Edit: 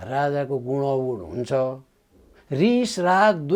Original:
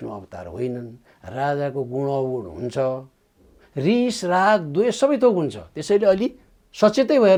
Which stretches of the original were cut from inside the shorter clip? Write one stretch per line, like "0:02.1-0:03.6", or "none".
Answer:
none